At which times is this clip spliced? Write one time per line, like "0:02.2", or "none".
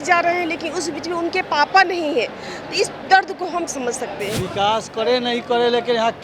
0:04.4